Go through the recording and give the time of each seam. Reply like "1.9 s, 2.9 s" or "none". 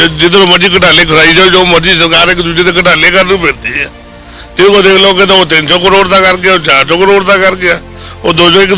none